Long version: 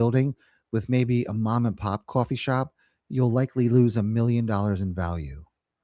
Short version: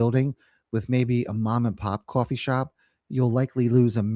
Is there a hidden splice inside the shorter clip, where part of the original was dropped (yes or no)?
no